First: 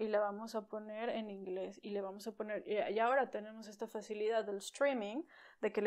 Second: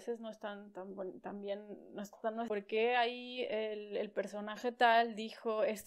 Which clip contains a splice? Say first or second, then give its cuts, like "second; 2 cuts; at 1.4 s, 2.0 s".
second; 1 cut; at 2.5 s